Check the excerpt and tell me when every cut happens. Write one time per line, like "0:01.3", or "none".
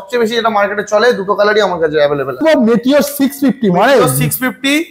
0:02.4